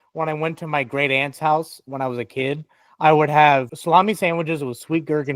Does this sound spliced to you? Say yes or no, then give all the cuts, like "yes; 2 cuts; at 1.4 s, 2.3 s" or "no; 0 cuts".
yes; 1 cut; at 3.7 s